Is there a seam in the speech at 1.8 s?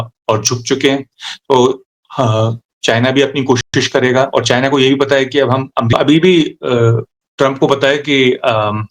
no; 1 cut; at 5.9 s

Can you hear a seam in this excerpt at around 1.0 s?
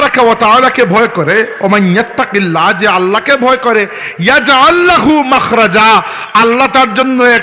no; 0 cuts

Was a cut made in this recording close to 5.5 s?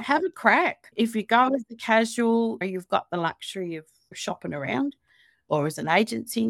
no; 2 cuts; at 2.6 s, 4.2 s

